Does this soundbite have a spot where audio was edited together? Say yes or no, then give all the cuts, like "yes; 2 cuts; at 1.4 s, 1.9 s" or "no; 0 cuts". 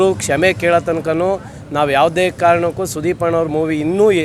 no; 0 cuts